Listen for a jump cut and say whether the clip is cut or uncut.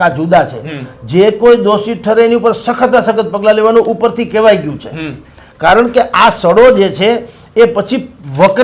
uncut